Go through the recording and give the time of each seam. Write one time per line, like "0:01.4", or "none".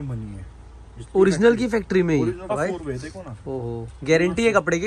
0:02.5